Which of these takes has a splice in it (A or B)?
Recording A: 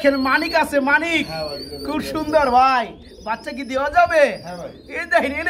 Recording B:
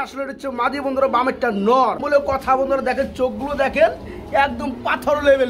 B